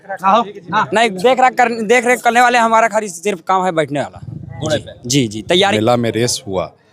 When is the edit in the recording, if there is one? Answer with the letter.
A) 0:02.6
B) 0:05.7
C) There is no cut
B